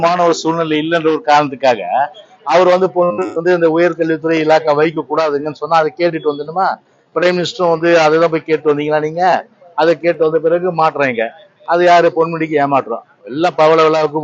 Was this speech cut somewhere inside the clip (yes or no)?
no